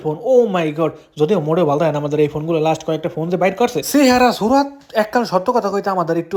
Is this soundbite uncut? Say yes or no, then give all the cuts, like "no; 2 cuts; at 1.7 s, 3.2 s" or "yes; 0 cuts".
yes; 0 cuts